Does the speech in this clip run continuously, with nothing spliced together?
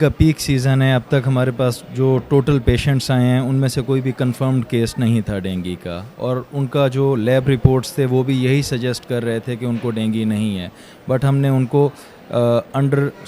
yes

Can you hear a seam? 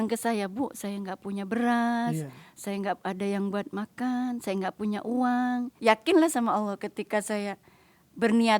yes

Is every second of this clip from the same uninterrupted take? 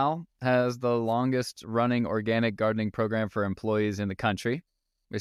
yes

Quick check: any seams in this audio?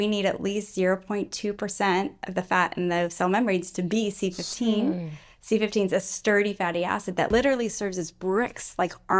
yes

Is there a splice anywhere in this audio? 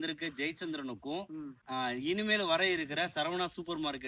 no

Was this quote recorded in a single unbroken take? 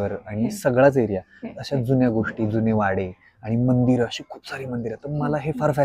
yes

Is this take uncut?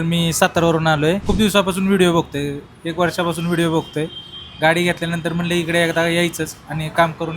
no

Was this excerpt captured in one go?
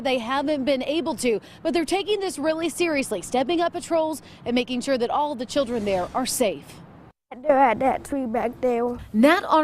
no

